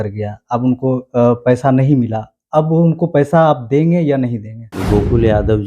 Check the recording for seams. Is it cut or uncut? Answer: cut